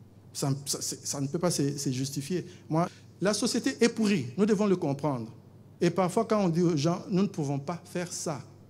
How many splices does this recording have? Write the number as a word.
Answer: one